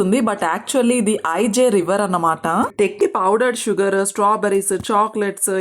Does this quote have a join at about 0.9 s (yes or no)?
no